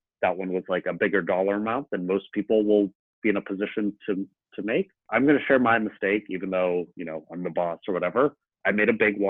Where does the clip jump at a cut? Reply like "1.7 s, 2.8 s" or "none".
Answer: 5.0 s